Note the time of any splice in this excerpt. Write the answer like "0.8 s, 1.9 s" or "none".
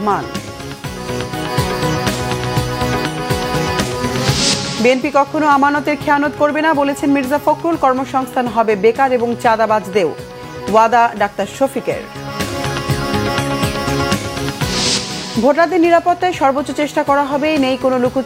none